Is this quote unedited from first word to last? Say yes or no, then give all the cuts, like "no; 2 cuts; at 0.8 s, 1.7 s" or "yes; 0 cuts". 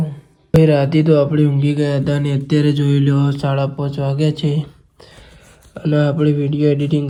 yes; 0 cuts